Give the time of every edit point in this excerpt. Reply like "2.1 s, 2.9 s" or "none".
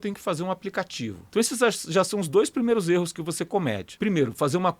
1.2 s, 3.9 s